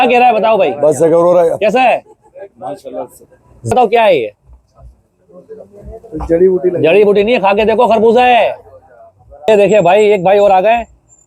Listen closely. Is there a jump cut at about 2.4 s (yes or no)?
no